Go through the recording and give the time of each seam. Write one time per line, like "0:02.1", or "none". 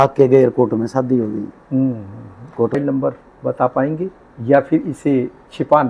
0:02.8